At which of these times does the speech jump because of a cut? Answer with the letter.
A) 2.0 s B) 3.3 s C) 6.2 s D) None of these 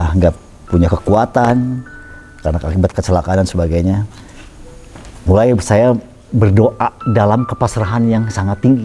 D